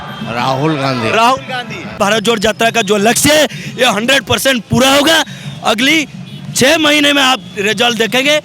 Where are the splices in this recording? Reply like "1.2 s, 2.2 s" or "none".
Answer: 2.0 s